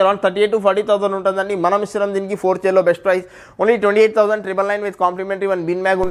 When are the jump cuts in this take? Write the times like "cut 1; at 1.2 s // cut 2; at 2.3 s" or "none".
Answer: none